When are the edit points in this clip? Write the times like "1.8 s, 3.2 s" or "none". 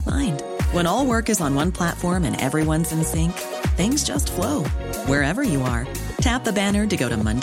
none